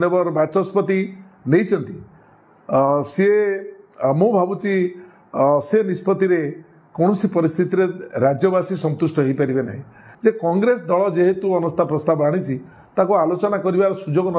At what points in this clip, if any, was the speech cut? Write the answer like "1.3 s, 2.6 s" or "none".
10.0 s, 13.4 s